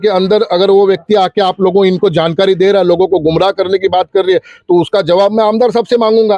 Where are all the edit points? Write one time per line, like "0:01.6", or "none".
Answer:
none